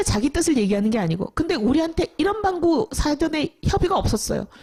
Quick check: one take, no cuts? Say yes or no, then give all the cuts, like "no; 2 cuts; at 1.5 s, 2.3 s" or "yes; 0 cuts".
yes; 0 cuts